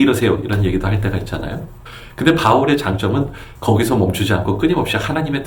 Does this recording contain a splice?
no; 0 cuts

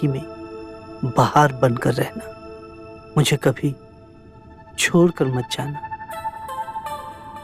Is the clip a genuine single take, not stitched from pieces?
yes; 0 cuts

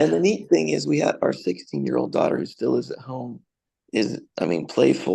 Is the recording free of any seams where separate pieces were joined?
yes; 0 cuts

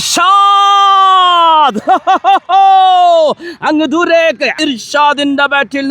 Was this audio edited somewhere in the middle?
yes; 1 cut; at 4.6 s

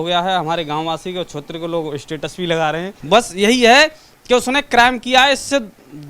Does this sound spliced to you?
yes; 1 cut; at 2.9 s

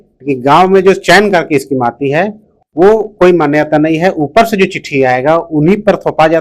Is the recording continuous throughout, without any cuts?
yes; 0 cuts

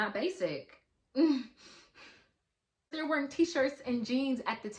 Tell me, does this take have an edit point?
yes; 1 cut; at 2.9 s

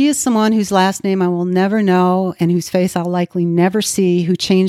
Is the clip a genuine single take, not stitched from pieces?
yes; 0 cuts

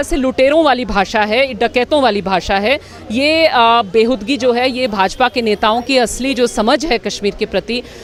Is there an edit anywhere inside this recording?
no; 0 cuts

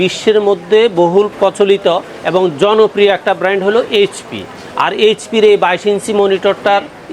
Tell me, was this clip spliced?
yes; 1 cut; at 1.3 s

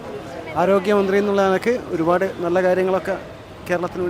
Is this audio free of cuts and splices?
yes; 0 cuts

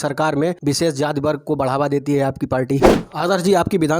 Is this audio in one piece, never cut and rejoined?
no; 1 cut; at 3.0 s

